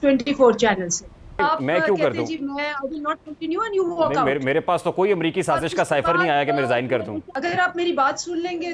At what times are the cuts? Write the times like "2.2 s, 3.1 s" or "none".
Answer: 1.3 s, 7.2 s

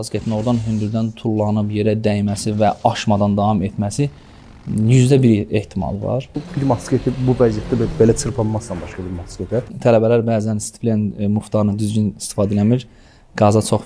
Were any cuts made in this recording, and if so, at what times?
6.5 s, 9.7 s

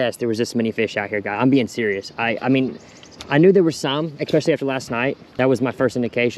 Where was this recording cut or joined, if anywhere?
5.2 s

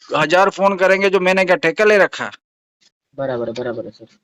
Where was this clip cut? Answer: none

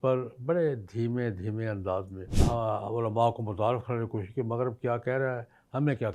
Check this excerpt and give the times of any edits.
2.2 s

